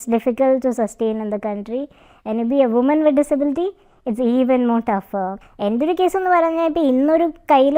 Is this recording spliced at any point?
yes; 1 cut; at 5.4 s

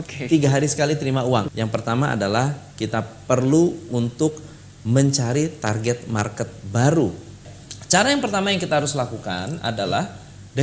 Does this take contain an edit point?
yes; 2 cuts; at 1.6 s, 7.7 s

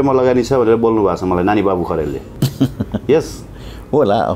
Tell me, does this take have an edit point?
yes; 1 cut; at 2.3 s

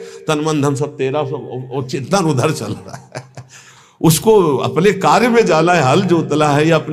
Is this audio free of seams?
yes; 0 cuts

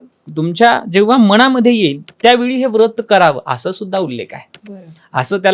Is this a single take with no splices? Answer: yes; 0 cuts

